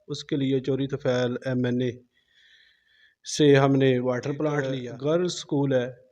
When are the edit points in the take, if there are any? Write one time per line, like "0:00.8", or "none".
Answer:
0:04.8

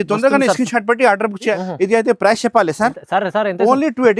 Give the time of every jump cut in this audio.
0:01.5

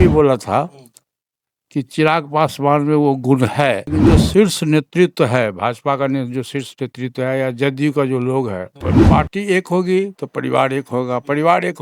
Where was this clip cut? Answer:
0:03.8
0:08.9

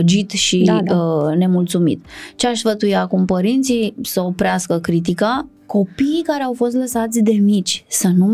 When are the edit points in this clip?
0:05.5

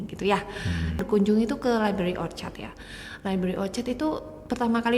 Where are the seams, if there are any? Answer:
0:01.0

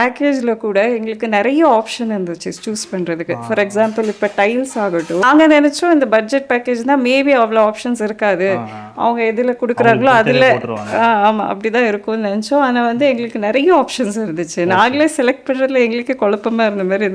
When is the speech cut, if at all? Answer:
none

